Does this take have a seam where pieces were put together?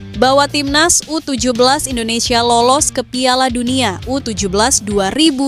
no; 0 cuts

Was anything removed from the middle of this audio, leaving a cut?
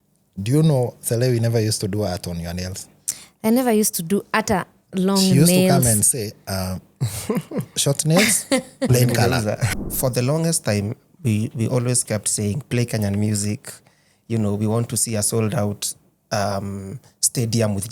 yes; 1 cut; at 9.7 s

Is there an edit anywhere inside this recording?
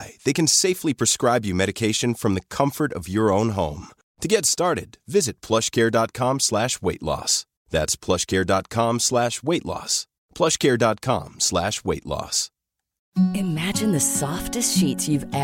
yes; 1 cut; at 13.0 s

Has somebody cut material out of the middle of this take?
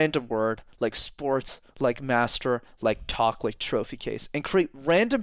no; 0 cuts

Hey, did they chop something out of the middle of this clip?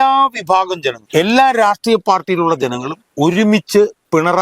yes; 1 cut; at 1.0 s

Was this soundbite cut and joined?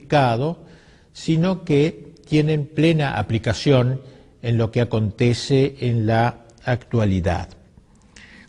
yes; 1 cut; at 7.1 s

